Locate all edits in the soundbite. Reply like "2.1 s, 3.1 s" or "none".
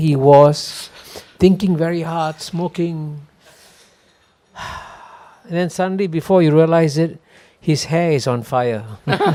none